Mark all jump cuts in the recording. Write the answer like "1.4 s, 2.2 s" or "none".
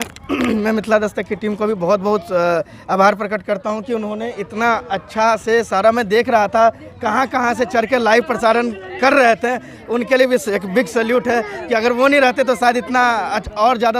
none